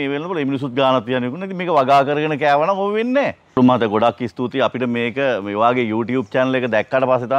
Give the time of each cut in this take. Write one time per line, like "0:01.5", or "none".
0:03.4